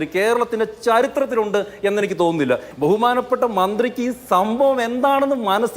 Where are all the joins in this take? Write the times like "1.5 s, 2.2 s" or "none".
2.7 s